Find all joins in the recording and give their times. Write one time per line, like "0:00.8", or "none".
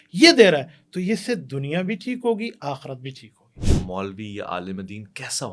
0:03.7

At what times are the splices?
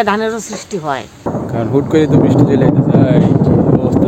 0:01.2

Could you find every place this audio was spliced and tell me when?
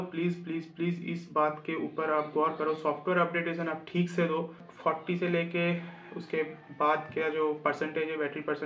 0:04.5

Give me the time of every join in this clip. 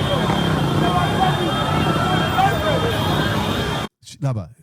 0:01.0

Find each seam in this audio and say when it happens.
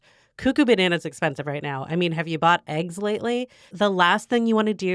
0:03.7

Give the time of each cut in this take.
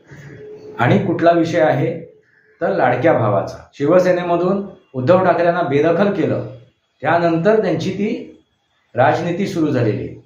0:03.6

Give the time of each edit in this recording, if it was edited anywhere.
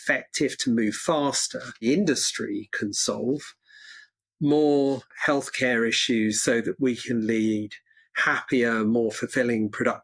0:01.8
0:05.1

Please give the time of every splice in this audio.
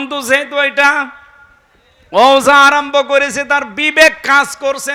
none

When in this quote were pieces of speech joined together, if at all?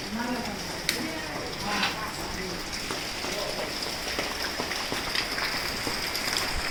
none

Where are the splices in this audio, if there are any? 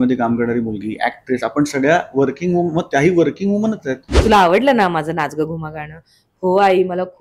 0:04.1

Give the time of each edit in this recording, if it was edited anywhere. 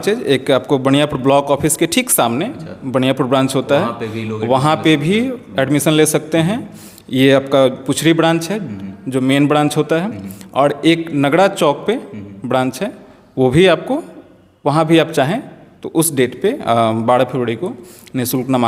none

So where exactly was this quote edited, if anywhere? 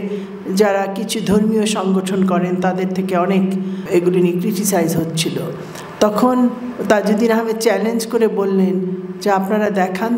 none

